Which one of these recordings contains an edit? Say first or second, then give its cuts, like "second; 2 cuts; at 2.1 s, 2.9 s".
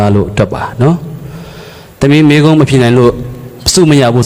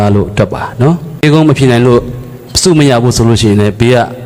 second; 1 cut; at 1.2 s